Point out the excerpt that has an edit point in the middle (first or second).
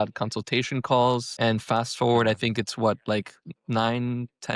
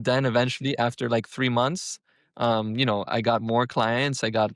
first